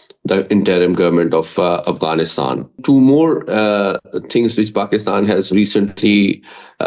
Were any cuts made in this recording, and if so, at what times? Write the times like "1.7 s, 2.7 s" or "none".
2.8 s